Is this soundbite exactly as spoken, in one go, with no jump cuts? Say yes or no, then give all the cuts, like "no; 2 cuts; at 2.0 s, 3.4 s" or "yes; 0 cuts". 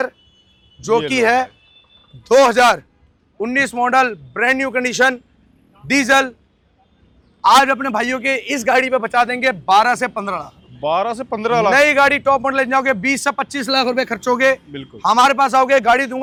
yes; 0 cuts